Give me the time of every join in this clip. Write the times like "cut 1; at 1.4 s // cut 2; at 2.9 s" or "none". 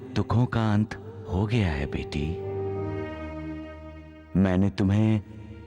cut 1; at 2.9 s